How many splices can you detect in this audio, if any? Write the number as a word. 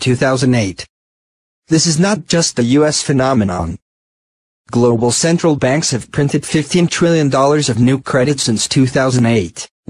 one